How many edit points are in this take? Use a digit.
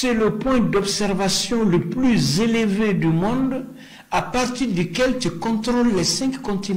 0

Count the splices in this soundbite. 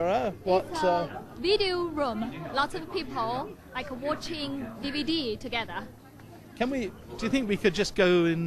1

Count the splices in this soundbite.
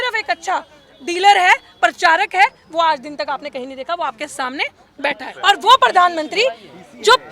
1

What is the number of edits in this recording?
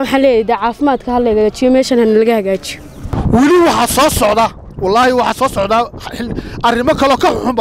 1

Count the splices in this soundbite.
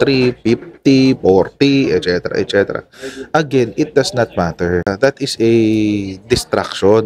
1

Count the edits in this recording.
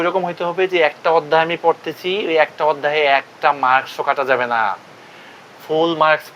0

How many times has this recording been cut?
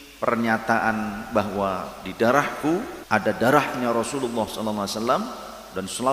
1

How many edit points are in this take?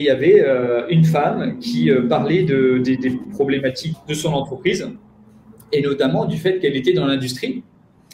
1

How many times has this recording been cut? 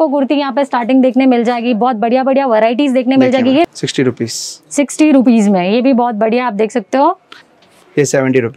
2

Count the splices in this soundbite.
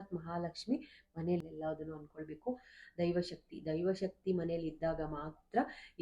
1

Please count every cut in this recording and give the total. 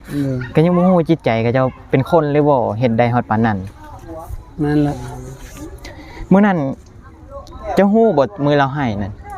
1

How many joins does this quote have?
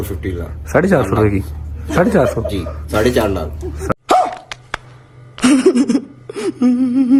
0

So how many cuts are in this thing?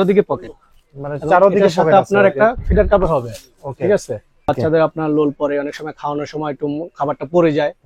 1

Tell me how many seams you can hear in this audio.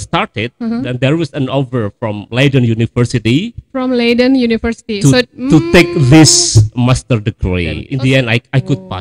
1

